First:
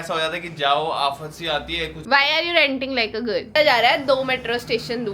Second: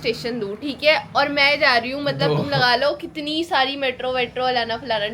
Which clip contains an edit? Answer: first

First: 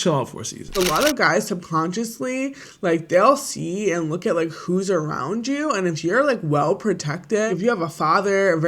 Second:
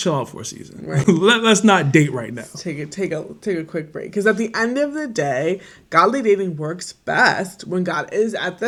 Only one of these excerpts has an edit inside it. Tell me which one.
first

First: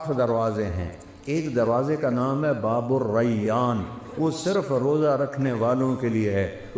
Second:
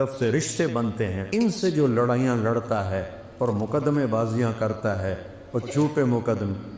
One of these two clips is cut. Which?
second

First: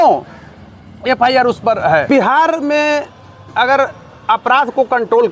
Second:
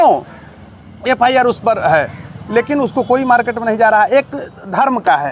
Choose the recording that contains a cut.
first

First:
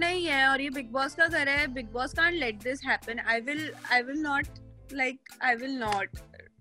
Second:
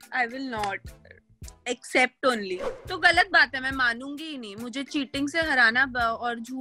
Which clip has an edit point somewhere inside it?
second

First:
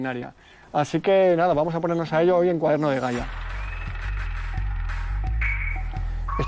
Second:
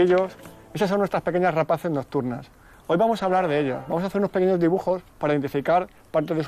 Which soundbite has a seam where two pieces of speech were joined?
first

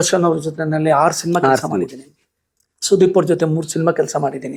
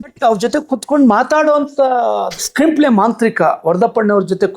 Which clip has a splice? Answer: second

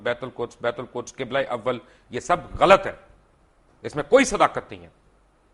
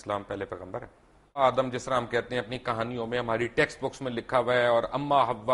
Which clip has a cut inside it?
second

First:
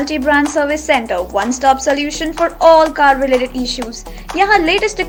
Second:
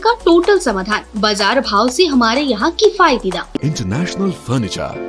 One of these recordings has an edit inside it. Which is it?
second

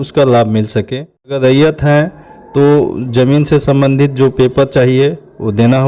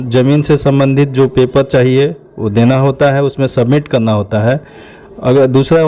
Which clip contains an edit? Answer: first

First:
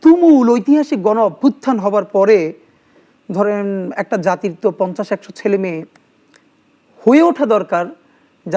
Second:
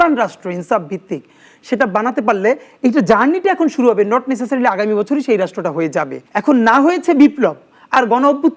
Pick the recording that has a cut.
second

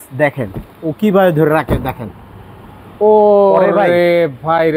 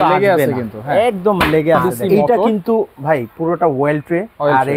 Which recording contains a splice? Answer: second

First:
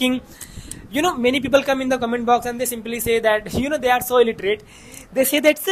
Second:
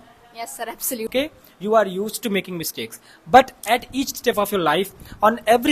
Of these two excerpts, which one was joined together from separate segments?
second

